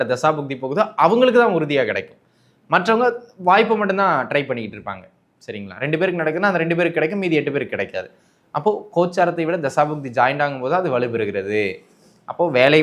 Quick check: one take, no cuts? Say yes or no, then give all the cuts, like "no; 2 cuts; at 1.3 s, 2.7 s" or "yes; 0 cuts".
yes; 0 cuts